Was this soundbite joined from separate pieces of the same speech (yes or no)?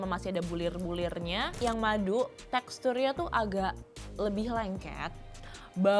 yes